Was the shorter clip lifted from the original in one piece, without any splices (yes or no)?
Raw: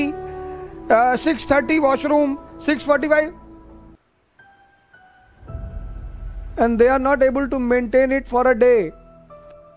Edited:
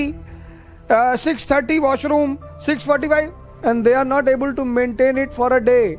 no